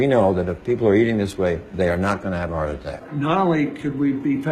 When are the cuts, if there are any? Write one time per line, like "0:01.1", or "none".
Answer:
0:03.0